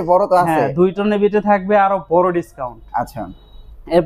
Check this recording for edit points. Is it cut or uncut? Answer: uncut